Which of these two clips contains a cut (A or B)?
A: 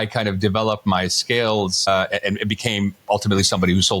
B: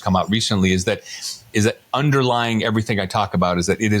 A